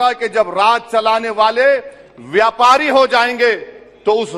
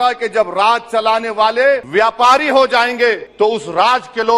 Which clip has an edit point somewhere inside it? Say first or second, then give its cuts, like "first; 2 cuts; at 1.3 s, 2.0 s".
second; 2 cuts; at 1.8 s, 3.3 s